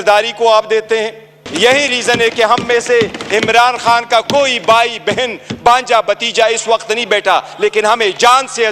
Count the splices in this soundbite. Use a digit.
1